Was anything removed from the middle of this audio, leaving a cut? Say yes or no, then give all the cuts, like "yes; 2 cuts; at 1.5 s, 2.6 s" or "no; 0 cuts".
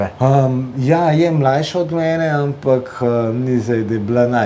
no; 0 cuts